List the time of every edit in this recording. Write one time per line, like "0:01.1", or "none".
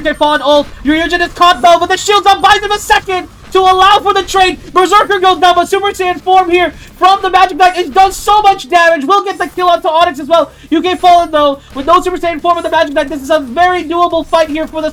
none